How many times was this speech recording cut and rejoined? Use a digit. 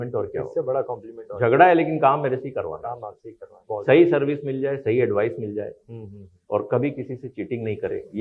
1